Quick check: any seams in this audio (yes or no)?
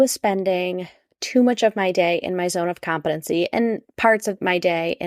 no